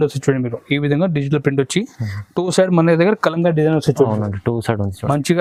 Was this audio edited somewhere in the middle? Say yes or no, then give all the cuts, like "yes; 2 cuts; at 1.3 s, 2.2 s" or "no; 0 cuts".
no; 0 cuts